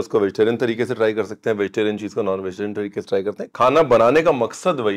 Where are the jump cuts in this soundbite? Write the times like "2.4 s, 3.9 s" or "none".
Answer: none